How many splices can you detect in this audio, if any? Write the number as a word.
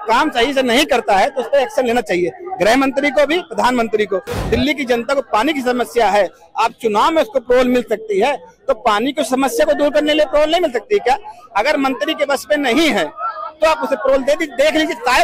one